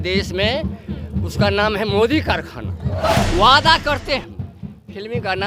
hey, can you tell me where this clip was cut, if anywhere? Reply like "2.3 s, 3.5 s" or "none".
3.1 s